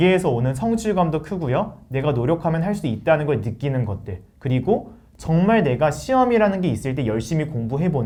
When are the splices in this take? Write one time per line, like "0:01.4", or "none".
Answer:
none